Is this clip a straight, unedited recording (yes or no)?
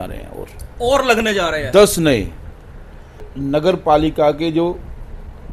no